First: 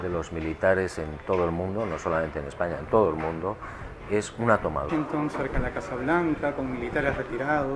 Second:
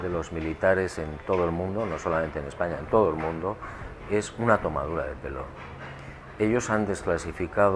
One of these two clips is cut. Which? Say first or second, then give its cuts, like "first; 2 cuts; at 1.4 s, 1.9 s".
second; 1 cut; at 4.9 s